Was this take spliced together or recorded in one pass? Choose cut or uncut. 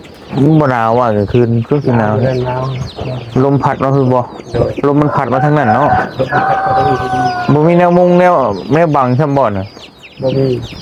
uncut